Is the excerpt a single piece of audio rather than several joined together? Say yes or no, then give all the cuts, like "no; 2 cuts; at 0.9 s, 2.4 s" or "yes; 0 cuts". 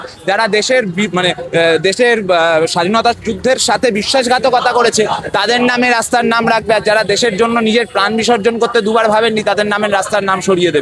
yes; 0 cuts